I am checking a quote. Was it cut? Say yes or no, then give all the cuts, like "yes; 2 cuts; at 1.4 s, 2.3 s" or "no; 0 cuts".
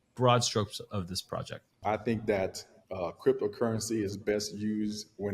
yes; 1 cut; at 1.8 s